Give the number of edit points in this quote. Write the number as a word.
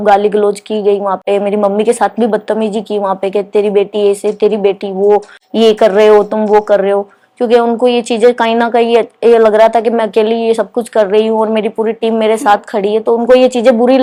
zero